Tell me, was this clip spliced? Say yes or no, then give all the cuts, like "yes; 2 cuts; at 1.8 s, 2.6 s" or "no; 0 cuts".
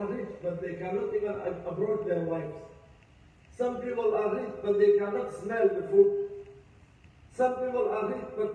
no; 0 cuts